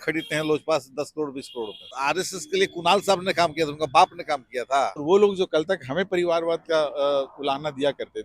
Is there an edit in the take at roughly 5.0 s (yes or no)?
yes